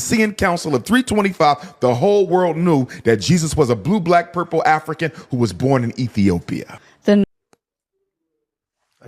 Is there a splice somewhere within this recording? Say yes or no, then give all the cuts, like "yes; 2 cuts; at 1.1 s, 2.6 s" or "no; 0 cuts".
yes; 1 cut; at 7.2 s